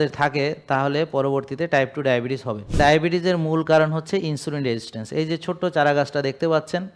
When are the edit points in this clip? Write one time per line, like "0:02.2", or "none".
0:02.7